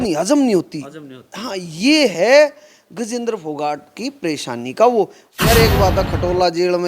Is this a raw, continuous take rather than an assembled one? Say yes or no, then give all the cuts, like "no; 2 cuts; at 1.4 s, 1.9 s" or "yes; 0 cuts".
no; 1 cut; at 5.3 s